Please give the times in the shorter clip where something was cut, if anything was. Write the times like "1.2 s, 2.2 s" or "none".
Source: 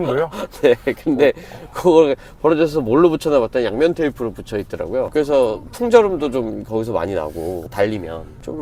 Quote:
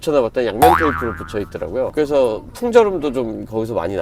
none